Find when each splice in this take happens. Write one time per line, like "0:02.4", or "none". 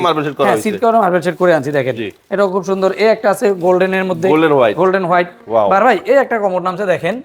none